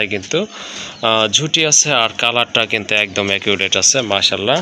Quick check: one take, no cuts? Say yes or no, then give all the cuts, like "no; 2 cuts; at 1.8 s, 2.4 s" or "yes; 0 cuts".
yes; 0 cuts